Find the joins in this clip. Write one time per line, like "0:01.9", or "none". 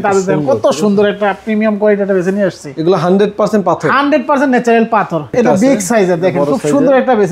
0:05.3